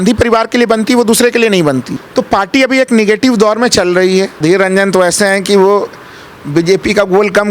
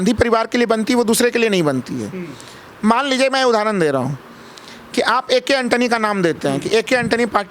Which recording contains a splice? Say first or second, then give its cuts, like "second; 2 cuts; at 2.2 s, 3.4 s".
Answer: first; 2 cuts; at 2.0 s, 4.3 s